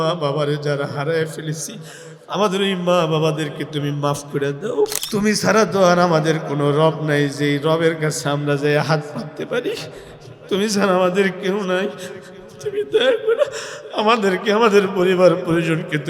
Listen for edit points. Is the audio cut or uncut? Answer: cut